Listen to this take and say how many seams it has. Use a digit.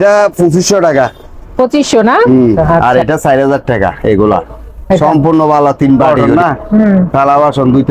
2